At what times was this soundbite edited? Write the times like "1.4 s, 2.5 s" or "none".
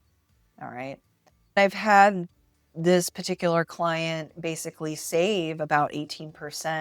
1.6 s

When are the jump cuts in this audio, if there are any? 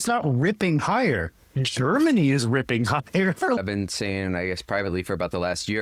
3.6 s

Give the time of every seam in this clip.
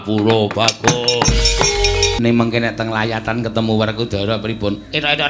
2.1 s

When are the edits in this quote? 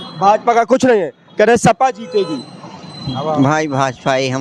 none

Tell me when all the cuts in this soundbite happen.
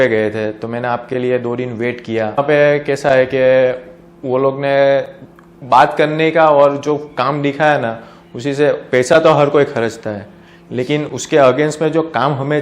2.4 s

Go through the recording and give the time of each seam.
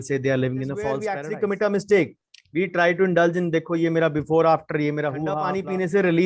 1.1 s, 5.4 s

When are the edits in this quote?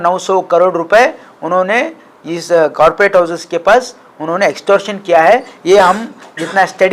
none

